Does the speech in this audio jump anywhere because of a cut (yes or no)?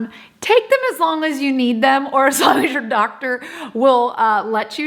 no